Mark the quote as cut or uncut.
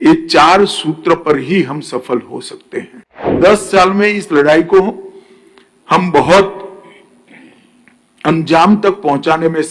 cut